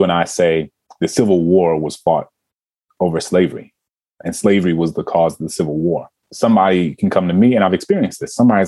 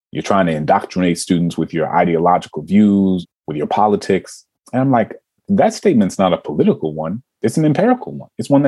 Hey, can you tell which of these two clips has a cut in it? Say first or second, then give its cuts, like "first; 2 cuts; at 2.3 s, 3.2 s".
second; 3 cuts; at 3.3 s, 5.4 s, 7.3 s